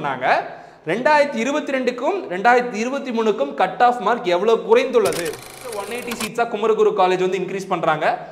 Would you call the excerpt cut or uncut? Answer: cut